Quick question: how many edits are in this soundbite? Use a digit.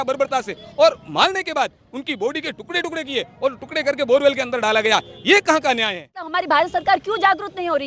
1